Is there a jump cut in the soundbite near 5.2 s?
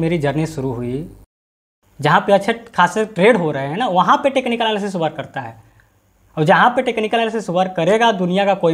no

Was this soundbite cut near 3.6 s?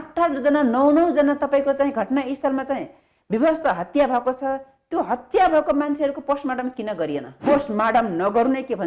no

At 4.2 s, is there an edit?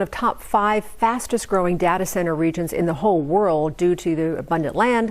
no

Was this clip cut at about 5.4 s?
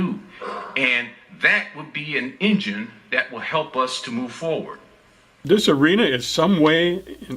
yes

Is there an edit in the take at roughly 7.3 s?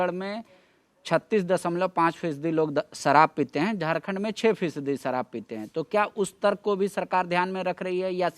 no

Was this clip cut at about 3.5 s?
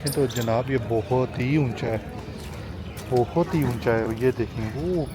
no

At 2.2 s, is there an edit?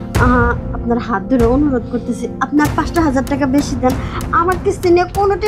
no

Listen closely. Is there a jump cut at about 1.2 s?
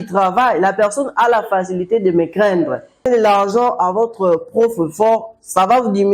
no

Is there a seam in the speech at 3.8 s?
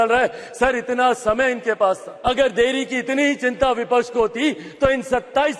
no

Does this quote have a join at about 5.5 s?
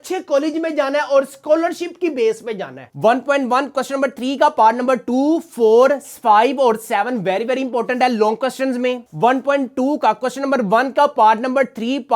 no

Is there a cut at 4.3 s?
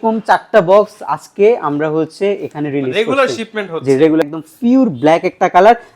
yes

